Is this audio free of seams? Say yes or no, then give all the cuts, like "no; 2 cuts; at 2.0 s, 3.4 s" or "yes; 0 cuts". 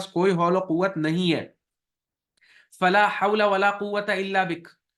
yes; 0 cuts